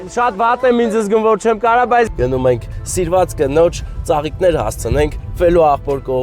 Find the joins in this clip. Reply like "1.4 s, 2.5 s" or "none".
2.1 s